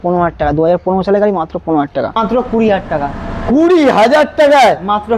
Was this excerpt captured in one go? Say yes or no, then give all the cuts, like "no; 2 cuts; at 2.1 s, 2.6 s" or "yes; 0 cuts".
no; 1 cut; at 2.2 s